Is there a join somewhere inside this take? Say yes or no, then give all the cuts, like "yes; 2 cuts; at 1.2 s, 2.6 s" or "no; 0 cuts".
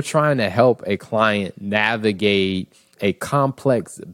yes; 1 cut; at 2.9 s